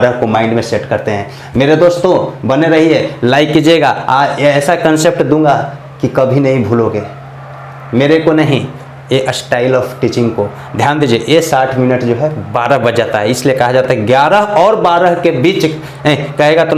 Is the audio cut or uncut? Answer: uncut